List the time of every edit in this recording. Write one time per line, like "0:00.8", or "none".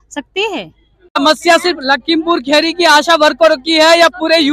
0:01.2